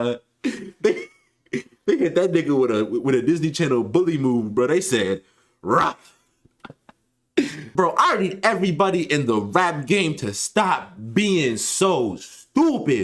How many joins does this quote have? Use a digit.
1